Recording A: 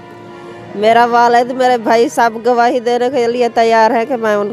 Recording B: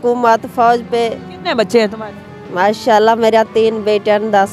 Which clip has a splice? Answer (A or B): B